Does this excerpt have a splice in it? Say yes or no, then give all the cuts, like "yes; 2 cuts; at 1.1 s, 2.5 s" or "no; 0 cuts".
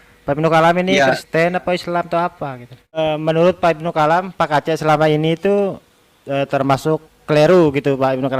yes; 1 cut; at 3.0 s